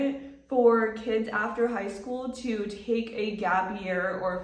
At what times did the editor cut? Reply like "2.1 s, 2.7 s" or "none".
none